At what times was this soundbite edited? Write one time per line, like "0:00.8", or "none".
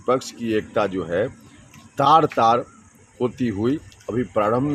none